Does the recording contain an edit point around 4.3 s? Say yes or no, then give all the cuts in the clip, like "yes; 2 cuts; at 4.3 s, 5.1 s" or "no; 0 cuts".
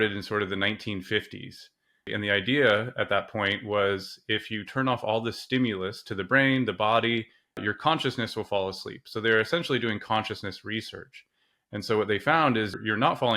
no; 2 cuts; at 2.1 s, 7.6 s